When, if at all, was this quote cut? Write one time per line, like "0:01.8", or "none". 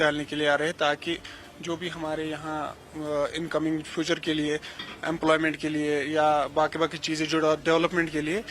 0:01.9